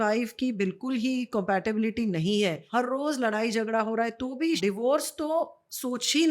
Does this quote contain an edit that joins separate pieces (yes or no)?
yes